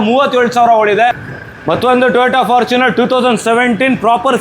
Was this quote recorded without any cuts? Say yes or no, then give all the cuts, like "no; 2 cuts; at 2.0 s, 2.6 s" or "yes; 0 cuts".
no; 1 cut; at 1.3 s